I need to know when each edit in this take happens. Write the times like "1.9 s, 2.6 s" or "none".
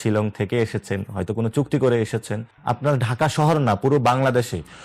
2.5 s